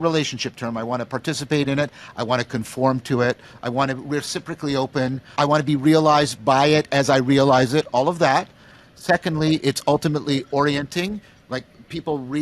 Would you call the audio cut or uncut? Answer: cut